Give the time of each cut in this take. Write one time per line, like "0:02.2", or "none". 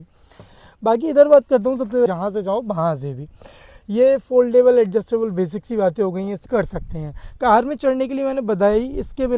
0:02.1
0:06.4